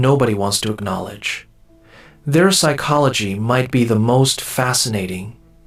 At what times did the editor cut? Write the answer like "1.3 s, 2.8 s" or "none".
none